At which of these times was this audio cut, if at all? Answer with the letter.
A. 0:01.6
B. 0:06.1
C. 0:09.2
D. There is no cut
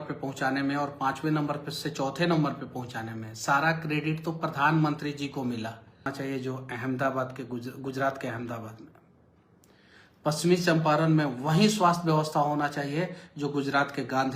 B